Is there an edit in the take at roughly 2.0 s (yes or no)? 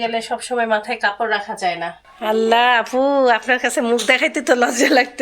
yes